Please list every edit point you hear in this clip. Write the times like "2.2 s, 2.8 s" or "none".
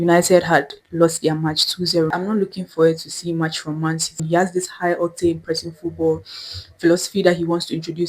2.1 s, 4.2 s

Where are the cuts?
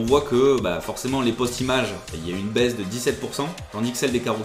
none

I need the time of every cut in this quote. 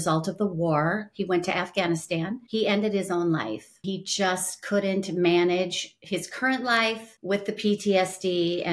2.4 s, 3.9 s, 7.1 s

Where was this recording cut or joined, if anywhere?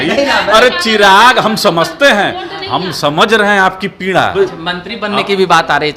4.3 s

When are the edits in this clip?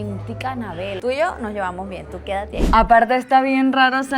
1.0 s, 2.6 s

